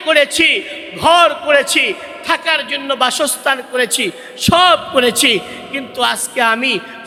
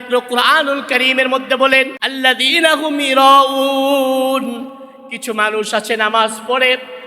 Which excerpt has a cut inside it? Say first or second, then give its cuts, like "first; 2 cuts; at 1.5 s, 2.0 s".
second; 1 cut; at 2.0 s